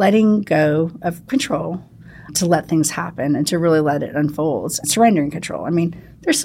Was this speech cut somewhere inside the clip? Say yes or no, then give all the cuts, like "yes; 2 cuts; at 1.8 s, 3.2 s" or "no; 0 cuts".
yes; 2 cuts; at 2.3 s, 4.8 s